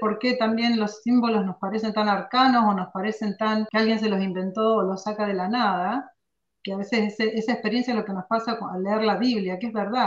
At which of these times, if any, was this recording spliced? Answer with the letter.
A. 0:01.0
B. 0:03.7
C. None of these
B